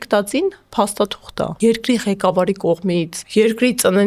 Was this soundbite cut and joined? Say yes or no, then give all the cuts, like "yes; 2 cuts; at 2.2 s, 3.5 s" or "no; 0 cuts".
yes; 2 cuts; at 1.5 s, 3.2 s